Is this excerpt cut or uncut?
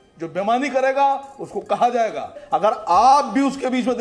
cut